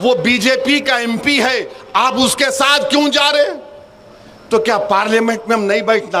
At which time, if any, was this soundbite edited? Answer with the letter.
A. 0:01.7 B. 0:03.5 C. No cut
C